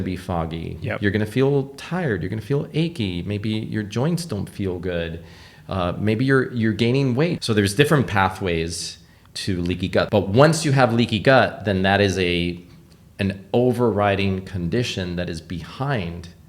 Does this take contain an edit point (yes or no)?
yes